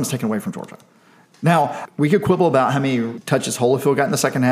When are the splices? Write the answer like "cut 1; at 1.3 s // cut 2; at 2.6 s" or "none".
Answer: cut 1; at 1.8 s // cut 2; at 3.2 s

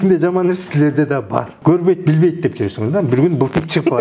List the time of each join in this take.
cut 1; at 1.5 s

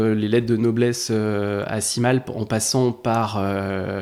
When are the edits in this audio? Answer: none

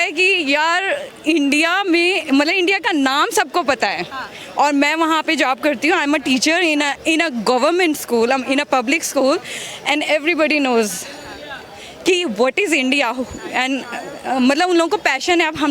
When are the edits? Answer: none

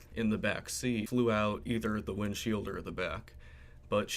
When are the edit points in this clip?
cut 1; at 1.1 s

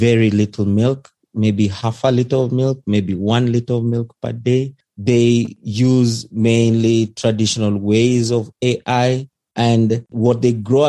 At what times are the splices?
none

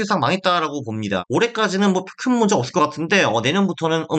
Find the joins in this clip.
cut 1; at 1.2 s

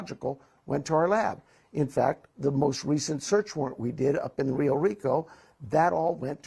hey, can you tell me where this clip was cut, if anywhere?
none

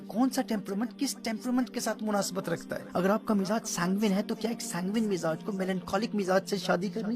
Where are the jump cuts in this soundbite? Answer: cut 1; at 2.8 s

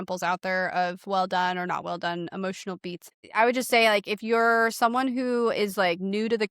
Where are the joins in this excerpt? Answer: cut 1; at 3.1 s

